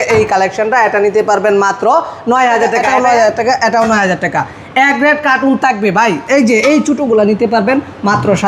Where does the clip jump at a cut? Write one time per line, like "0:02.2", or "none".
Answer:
0:02.8

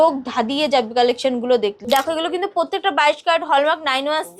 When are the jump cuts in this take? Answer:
0:01.8

